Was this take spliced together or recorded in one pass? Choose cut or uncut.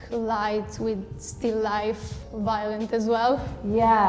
cut